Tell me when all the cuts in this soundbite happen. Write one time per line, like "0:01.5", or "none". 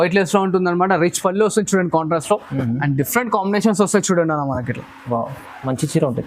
none